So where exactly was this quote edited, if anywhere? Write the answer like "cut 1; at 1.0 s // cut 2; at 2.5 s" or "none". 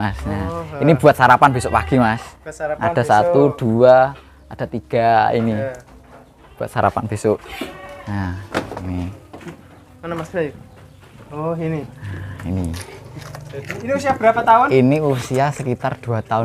none